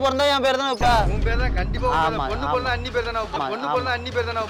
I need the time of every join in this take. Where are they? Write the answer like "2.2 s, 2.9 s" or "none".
none